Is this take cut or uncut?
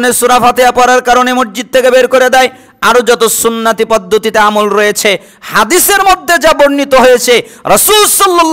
uncut